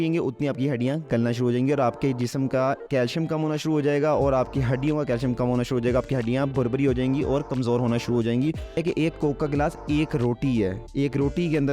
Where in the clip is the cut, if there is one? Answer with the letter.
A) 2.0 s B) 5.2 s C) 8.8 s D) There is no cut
C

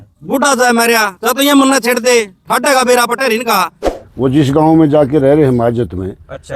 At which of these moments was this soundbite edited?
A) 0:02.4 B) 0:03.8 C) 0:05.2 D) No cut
B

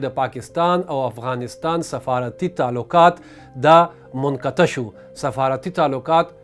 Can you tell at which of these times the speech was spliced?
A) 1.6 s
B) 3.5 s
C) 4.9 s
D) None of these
D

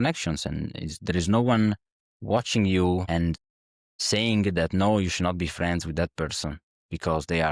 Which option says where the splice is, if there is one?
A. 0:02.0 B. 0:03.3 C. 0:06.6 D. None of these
B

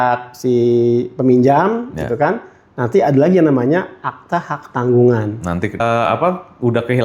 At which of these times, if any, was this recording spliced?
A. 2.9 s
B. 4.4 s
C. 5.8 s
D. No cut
C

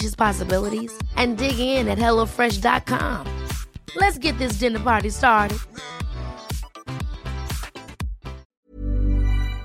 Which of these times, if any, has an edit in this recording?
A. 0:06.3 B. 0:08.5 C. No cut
B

